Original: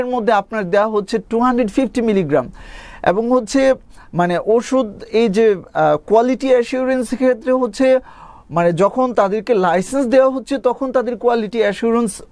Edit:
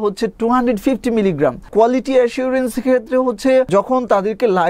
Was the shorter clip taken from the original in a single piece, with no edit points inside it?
no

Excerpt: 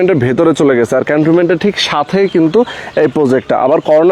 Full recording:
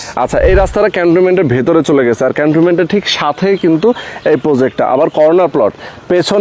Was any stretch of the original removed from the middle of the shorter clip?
no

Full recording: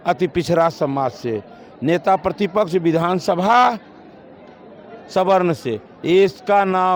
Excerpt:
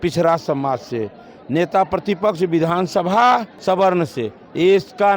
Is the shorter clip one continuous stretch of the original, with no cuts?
no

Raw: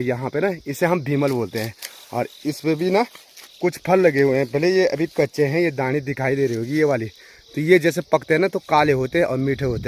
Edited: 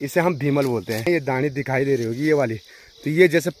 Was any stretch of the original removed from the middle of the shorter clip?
yes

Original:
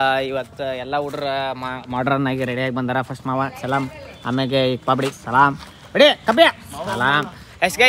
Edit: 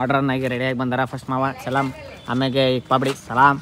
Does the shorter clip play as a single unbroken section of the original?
yes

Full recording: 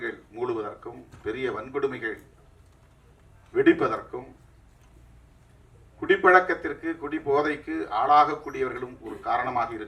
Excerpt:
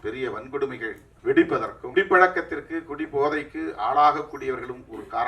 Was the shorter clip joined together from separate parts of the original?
yes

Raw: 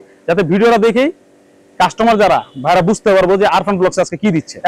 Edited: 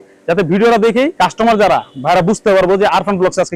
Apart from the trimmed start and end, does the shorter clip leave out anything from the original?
yes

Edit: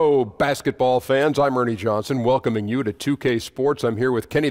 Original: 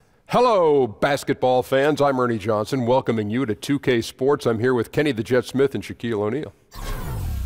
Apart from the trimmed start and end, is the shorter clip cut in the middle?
no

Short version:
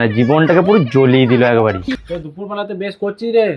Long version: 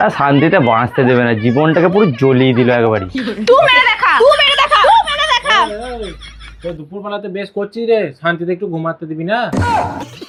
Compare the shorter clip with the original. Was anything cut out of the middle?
yes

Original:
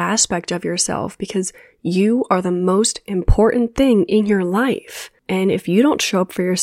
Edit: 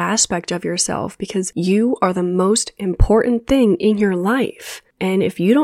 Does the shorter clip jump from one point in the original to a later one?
yes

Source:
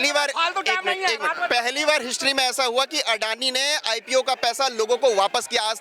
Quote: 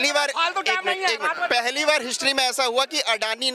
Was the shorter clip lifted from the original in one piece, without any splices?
yes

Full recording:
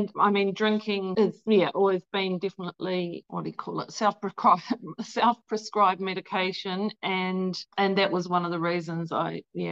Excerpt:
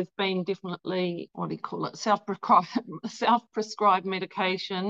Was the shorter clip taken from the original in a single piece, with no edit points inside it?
yes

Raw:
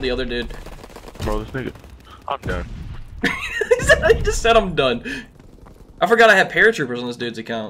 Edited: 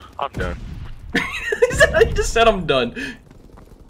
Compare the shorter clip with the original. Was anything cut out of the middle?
no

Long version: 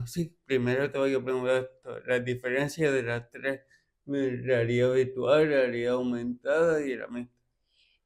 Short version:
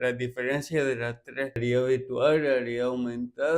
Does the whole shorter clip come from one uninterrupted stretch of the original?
no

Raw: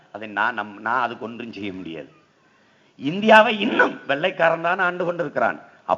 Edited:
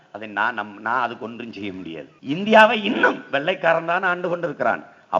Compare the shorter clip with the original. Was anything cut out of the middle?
yes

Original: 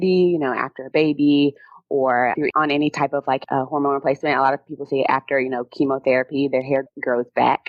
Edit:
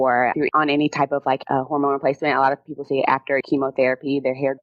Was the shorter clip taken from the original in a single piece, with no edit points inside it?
no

